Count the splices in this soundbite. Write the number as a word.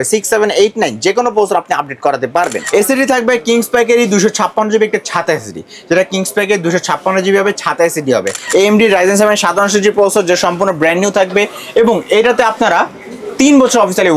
two